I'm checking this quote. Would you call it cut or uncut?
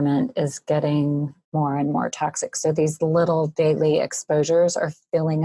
cut